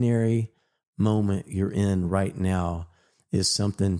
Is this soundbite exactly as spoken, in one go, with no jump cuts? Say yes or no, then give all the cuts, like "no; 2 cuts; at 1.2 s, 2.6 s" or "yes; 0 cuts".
yes; 0 cuts